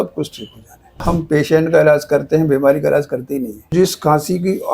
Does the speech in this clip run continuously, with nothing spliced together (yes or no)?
no